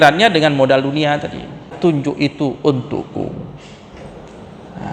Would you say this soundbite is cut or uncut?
cut